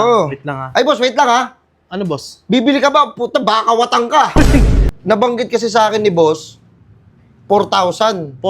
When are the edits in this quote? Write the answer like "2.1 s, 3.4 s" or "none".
4.8 s